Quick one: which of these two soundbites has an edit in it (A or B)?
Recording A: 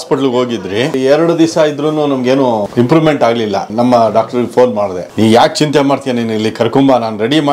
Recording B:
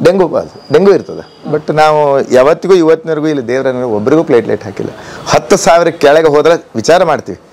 A